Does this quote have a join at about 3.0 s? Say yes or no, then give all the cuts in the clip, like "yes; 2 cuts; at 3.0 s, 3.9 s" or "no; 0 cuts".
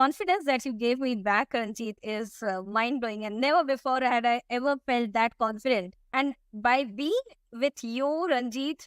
no; 1 cut; at 6.0 s